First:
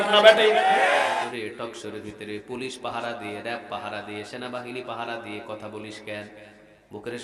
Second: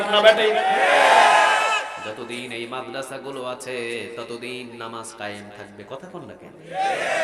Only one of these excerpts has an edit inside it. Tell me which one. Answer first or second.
first